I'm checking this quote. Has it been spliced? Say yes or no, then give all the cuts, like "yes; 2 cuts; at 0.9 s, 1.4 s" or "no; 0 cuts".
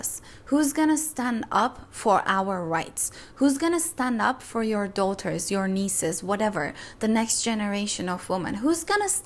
no; 0 cuts